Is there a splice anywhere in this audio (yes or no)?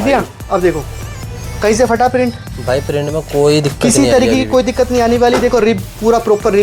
no